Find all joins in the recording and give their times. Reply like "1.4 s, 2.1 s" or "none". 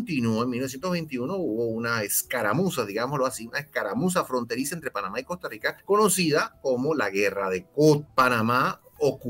5.8 s, 8.1 s